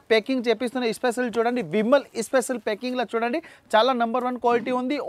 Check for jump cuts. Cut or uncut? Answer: uncut